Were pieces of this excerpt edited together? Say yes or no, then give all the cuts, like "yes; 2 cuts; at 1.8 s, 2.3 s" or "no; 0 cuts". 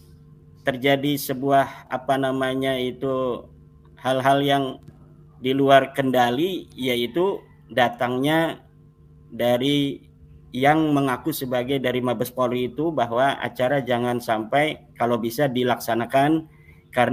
no; 0 cuts